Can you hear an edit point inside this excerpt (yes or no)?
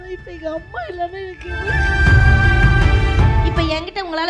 no